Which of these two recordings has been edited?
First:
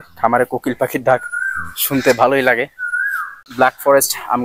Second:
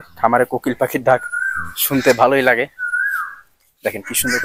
first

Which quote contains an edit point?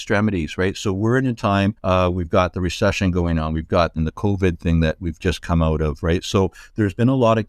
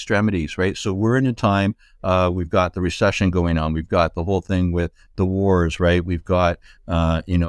first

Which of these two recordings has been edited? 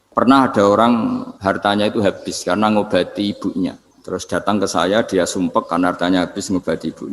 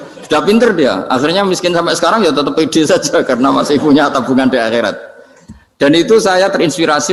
first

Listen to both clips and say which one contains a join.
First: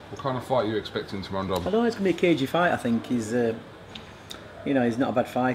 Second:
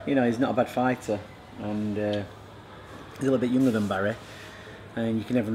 second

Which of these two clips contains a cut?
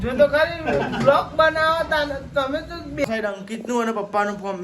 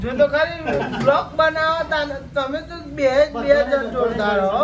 first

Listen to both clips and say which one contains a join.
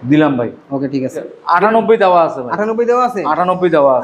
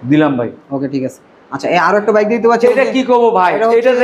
first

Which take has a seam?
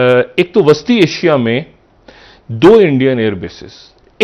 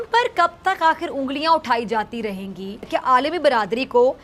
second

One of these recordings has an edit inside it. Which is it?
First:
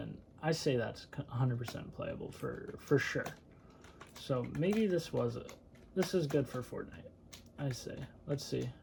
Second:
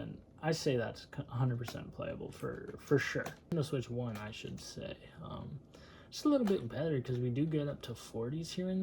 second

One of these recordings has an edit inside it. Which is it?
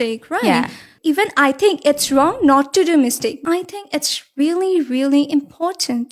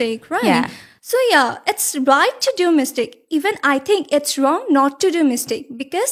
first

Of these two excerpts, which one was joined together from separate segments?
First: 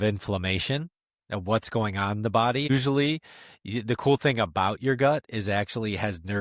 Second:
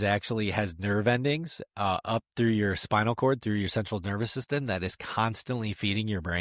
first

